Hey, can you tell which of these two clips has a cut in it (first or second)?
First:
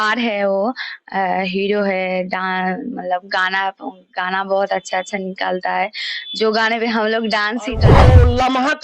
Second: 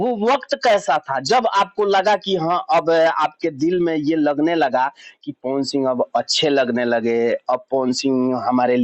first